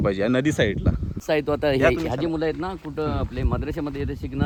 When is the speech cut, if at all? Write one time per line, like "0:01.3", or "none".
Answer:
none